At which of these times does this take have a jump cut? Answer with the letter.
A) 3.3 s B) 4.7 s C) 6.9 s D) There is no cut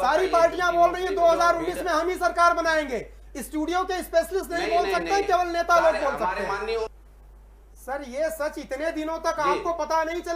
C